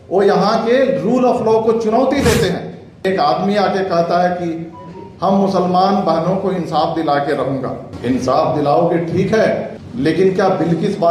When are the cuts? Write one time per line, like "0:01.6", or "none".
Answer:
0:03.0
0:07.9
0:09.8